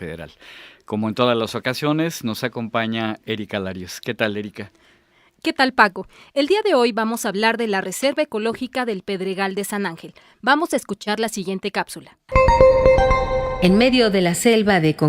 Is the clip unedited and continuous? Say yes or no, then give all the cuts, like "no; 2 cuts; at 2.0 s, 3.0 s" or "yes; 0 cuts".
no; 1 cut; at 7.6 s